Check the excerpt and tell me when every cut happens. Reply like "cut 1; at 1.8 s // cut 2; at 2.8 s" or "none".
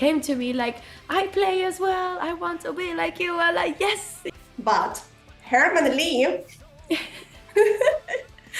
cut 1; at 4.2 s

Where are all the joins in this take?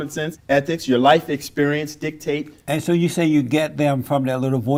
none

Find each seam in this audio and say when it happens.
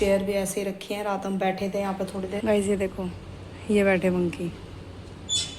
cut 1; at 2.4 s

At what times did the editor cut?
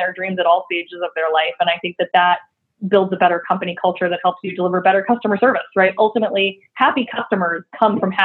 cut 1; at 6.7 s

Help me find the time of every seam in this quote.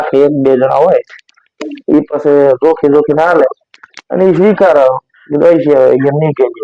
none

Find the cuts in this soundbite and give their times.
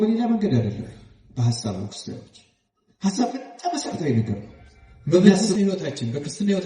cut 1; at 5.6 s

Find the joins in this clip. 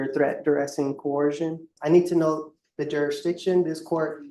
cut 1; at 1.7 s

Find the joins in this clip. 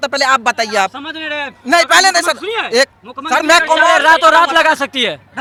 none

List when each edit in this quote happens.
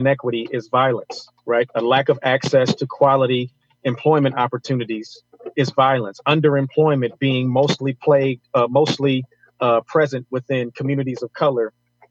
none

